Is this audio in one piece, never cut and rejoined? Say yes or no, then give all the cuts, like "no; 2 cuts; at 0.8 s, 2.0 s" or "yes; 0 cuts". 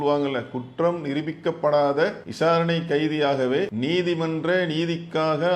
no; 2 cuts; at 2.2 s, 3.7 s